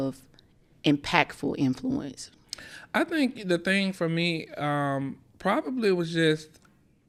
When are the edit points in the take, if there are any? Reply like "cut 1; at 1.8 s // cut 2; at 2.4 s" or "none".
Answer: none